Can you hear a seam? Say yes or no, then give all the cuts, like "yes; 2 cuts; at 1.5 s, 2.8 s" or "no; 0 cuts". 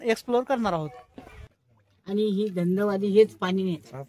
yes; 1 cut; at 1.3 s